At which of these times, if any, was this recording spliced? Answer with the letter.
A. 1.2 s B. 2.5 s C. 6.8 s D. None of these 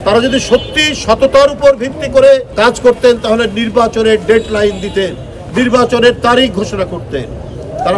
B